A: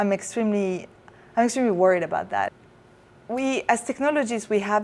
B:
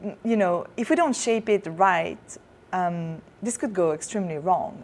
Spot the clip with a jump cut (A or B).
A